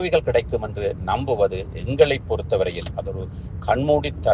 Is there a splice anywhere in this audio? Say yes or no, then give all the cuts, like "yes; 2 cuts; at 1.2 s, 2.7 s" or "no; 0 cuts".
no; 0 cuts